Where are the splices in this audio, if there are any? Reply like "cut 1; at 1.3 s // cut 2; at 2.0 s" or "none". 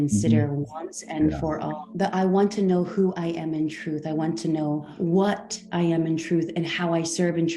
cut 1; at 1.8 s // cut 2; at 4.9 s